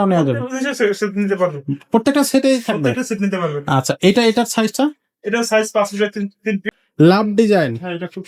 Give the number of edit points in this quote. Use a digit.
1